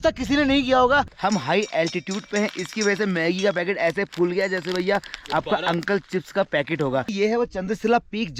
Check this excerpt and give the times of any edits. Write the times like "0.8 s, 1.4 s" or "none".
1.1 s, 7.1 s

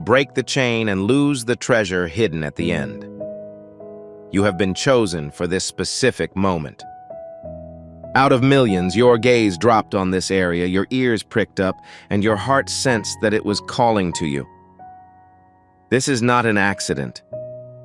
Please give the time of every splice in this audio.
3.0 s, 4.3 s

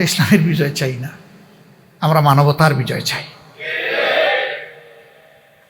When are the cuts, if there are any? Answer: none

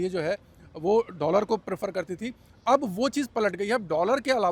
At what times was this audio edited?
none

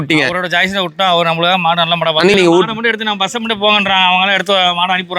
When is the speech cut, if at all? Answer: 2.3 s

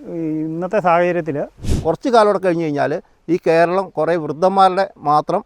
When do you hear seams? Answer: 1.7 s

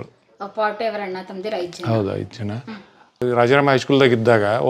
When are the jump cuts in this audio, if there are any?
3.1 s

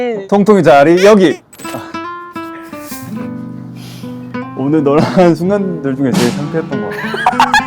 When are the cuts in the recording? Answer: 4.5 s

